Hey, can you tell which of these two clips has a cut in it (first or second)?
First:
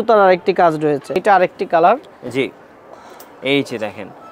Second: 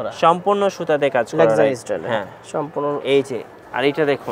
first